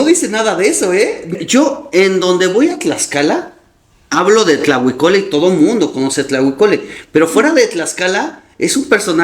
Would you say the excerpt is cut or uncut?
cut